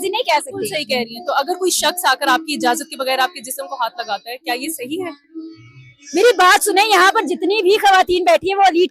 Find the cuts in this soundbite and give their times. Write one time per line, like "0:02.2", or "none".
none